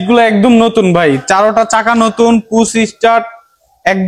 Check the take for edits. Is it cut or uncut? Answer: uncut